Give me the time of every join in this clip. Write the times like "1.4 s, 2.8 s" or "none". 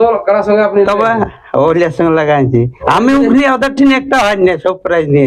2.8 s